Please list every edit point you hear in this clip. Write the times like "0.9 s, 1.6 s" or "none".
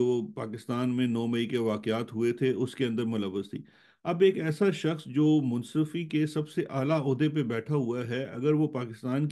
none